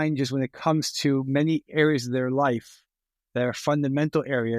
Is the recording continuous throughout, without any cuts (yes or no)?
yes